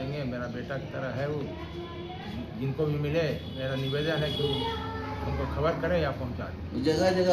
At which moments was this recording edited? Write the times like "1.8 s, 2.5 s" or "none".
none